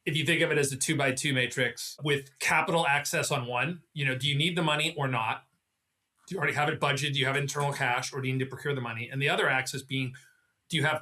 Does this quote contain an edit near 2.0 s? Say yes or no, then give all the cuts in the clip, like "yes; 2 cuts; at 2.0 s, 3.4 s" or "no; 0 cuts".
yes; 1 cut; at 2.0 s